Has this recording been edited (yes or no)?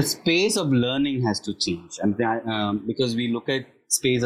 no